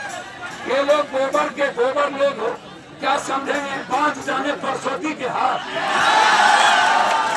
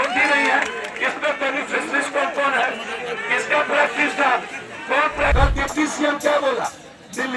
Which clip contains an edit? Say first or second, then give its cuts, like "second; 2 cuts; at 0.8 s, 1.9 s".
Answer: second; 1 cut; at 5.3 s